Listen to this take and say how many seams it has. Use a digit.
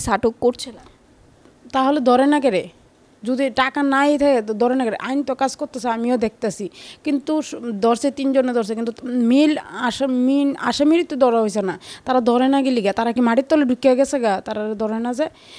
0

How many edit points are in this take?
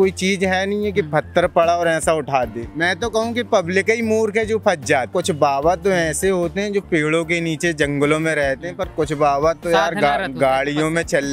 2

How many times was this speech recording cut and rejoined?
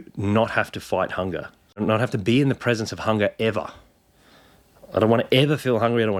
0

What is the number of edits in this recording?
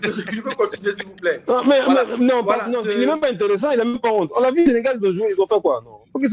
0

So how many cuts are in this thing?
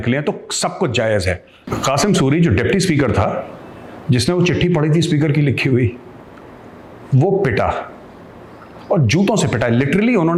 0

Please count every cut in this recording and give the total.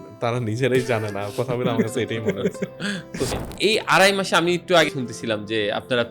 2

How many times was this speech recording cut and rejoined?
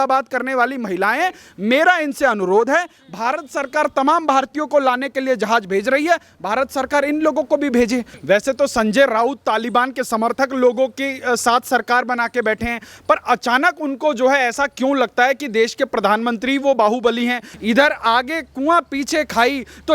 2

